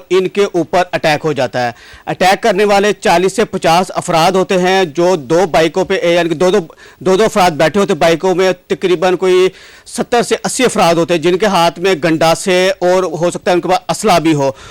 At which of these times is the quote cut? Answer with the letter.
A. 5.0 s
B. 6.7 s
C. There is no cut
C